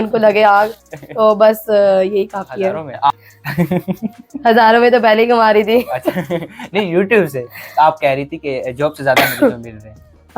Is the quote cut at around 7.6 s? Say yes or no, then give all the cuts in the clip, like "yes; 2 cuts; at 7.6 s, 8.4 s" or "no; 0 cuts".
no; 1 cut; at 3.1 s